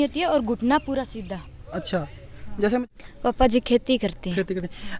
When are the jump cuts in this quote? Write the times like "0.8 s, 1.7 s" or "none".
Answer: 2.9 s